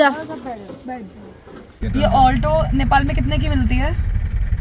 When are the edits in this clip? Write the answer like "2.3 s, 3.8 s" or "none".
1.6 s